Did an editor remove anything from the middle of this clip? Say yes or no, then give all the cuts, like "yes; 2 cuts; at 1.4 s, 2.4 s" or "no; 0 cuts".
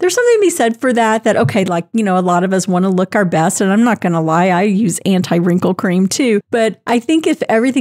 no; 0 cuts